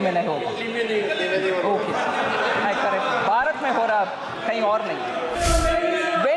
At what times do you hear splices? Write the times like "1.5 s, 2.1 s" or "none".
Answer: 5.4 s